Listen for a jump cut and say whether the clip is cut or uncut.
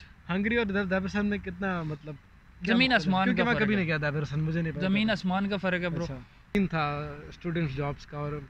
cut